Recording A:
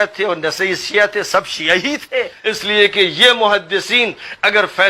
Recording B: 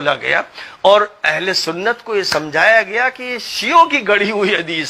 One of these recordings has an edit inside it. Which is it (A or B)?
A